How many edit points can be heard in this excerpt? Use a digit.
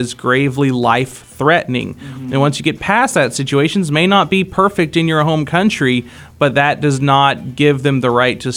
0